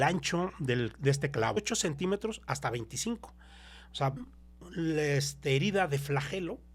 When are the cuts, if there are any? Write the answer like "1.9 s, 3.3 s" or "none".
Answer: 1.6 s, 4.3 s